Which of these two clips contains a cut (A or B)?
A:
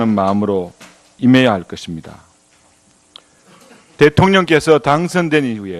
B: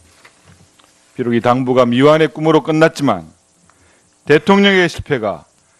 A